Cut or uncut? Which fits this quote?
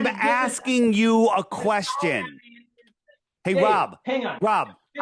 uncut